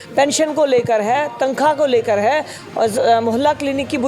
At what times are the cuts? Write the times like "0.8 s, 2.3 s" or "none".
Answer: none